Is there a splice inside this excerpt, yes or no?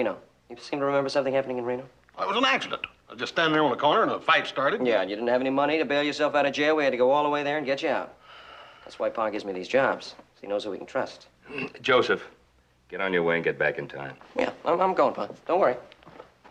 no